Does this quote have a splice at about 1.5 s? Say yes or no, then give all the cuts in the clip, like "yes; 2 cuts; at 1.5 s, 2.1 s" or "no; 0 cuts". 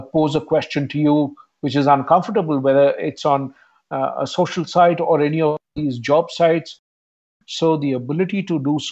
no; 1 cut; at 7.2 s